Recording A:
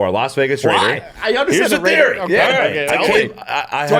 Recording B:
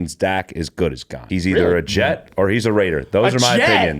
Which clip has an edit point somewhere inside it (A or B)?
B